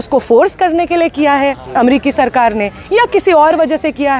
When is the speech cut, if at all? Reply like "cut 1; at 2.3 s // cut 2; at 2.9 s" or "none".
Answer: none

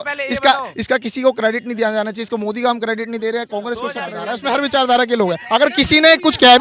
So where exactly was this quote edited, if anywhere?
cut 1; at 4.2 s

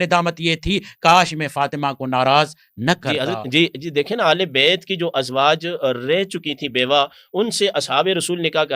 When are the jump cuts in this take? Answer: cut 1; at 3.1 s

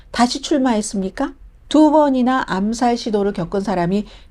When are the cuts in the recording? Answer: cut 1; at 1.5 s

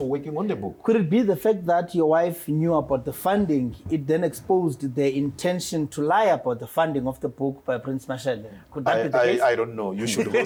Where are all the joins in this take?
none

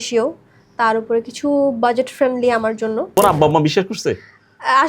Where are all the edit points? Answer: cut 1; at 3.2 s

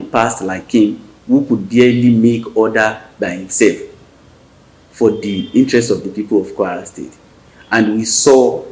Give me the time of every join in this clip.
none

